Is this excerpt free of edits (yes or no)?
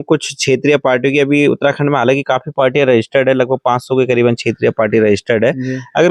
yes